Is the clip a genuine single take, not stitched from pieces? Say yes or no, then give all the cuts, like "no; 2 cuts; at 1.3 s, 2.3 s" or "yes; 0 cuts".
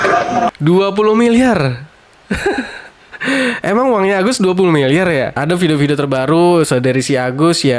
no; 1 cut; at 5.4 s